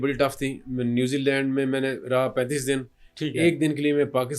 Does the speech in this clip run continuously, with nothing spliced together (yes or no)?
yes